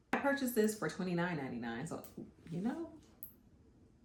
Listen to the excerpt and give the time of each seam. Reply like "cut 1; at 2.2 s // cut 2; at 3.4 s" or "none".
none